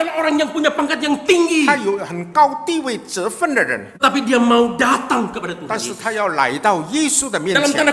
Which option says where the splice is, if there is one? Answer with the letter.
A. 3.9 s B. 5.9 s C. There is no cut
A